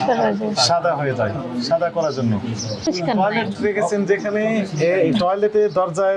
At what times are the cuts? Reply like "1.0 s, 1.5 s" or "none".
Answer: 2.9 s

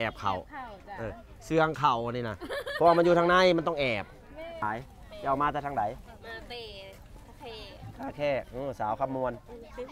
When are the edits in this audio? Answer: 4.6 s

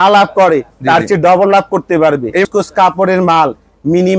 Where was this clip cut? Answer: 2.5 s

